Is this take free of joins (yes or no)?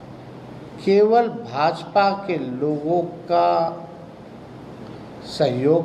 yes